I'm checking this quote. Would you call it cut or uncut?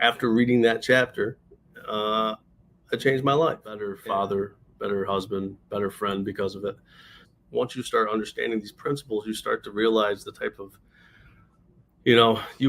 cut